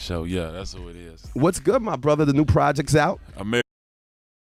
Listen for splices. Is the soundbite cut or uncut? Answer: uncut